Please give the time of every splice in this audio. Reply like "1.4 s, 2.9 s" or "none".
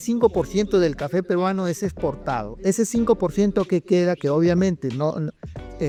none

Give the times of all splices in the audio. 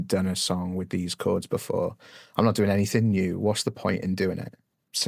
none

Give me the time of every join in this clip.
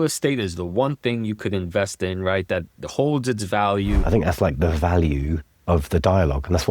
4.0 s, 5.5 s

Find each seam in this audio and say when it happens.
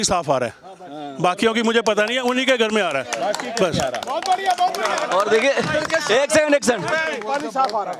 none

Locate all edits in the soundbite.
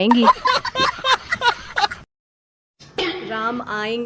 2.8 s

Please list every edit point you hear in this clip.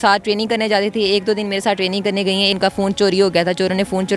2.6 s

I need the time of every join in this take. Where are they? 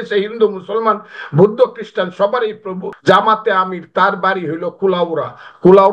2.8 s

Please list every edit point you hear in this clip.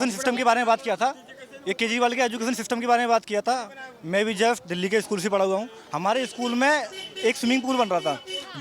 none

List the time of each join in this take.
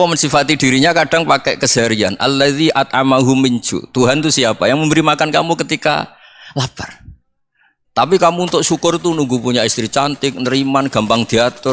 none

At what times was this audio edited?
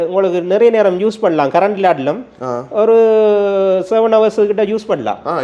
none

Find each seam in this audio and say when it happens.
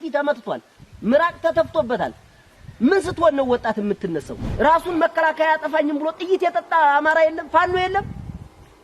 4.4 s

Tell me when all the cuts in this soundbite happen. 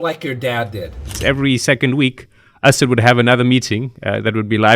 1.2 s

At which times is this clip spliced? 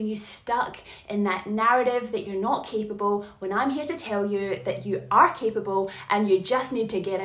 none

